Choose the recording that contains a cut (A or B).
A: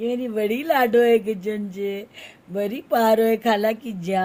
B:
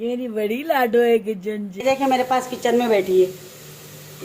B